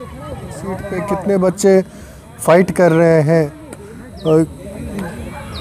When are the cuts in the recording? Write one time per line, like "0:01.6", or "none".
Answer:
0:00.9